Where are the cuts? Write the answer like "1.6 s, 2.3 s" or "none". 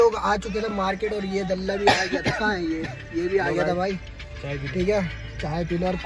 none